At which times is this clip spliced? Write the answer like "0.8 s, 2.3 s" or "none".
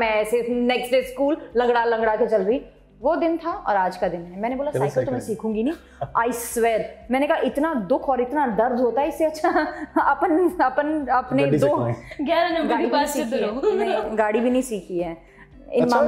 none